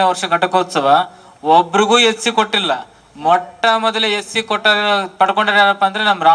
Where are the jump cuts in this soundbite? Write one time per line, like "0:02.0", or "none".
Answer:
none

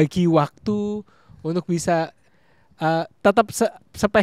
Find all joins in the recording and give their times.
none

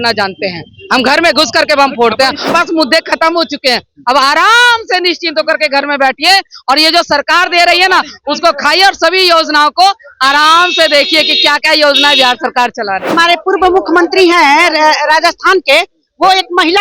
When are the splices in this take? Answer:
0:02.5
0:13.1

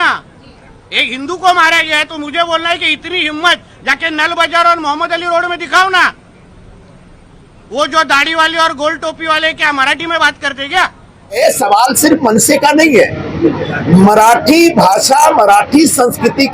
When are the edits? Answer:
0:11.4

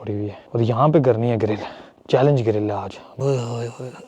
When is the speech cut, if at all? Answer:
0:03.0

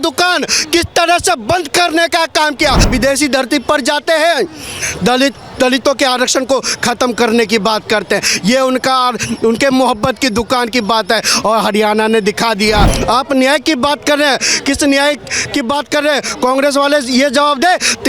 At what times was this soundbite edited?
0:02.9
0:12.9

